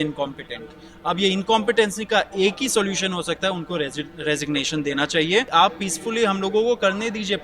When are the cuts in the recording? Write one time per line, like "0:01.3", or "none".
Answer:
0:05.5